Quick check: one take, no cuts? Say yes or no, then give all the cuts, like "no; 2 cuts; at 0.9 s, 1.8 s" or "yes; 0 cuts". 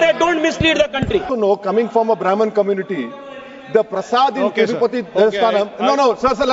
no; 1 cut; at 1.3 s